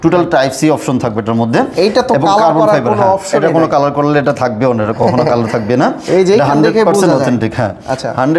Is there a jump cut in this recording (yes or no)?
no